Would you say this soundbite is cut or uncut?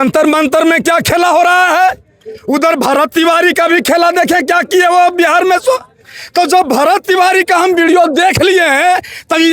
uncut